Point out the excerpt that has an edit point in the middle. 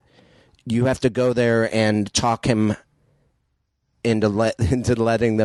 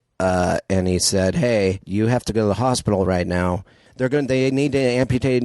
second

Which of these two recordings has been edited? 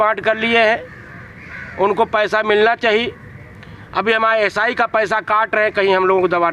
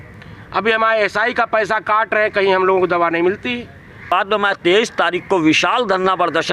second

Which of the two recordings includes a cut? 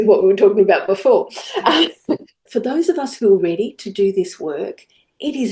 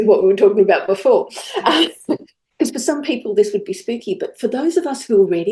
first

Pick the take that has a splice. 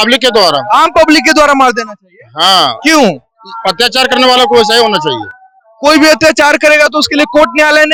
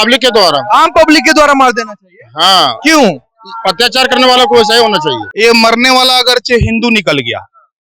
second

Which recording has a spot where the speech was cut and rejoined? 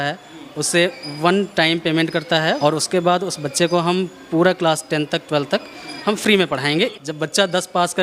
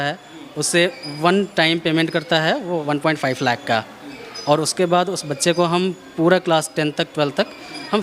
first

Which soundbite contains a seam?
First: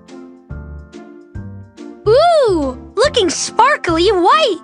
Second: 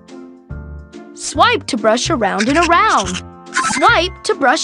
second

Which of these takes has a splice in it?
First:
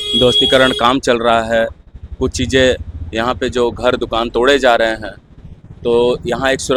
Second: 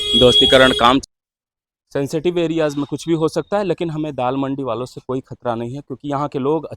second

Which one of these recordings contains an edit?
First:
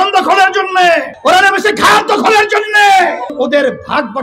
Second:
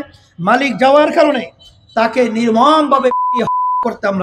first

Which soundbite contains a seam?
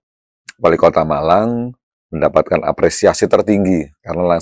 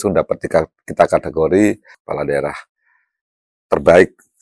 second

